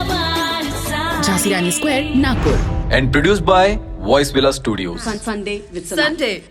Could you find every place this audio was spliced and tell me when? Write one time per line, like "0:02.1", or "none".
none